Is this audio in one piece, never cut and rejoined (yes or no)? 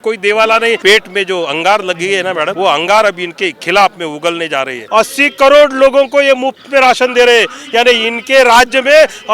no